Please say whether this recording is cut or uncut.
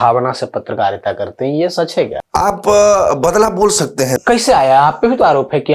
cut